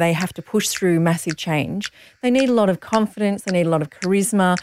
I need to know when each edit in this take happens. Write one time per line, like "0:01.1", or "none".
none